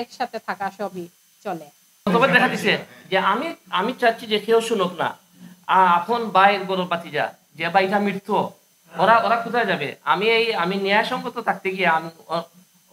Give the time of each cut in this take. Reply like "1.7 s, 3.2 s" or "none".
1.8 s